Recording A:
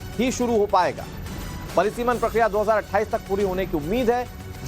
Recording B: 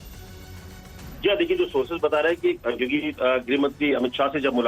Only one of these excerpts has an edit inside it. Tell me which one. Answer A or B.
A